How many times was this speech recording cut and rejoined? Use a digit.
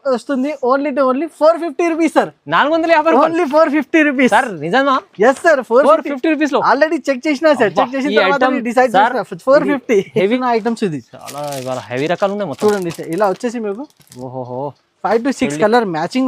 1